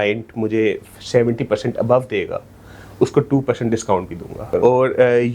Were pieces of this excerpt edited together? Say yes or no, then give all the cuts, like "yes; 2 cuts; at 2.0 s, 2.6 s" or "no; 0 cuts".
yes; 1 cut; at 4.4 s